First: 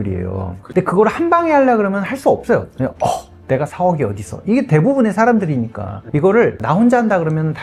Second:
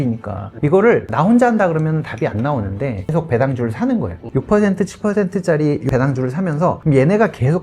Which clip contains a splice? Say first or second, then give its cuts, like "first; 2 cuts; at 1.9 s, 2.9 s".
second; 2 cuts; at 4.2 s, 6.1 s